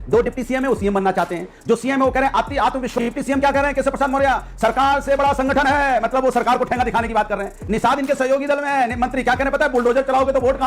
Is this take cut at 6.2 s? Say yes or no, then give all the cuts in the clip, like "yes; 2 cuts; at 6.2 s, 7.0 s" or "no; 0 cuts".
no; 1 cut; at 2.9 s